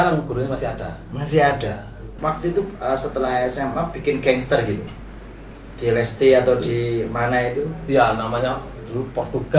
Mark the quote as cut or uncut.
cut